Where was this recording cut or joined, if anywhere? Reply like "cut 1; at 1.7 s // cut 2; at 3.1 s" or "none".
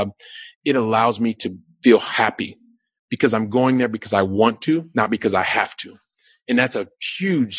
none